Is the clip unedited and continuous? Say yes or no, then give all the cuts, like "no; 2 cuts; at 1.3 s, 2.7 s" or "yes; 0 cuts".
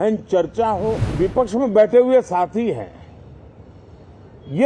no; 1 cut; at 1.1 s